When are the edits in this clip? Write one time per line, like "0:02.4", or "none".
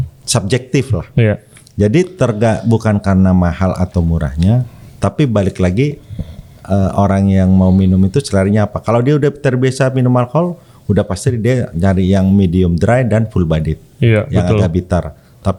none